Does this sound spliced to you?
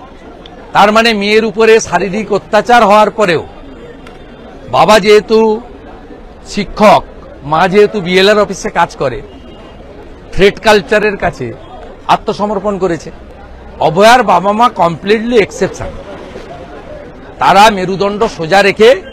no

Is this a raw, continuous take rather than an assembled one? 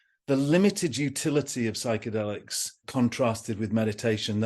no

